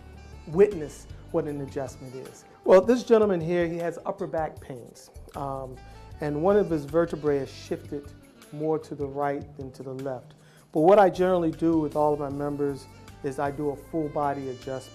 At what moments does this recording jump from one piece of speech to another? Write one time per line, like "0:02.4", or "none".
0:08.1